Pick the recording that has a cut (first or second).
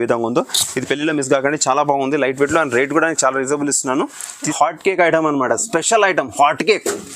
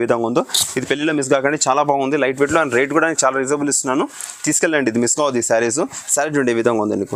first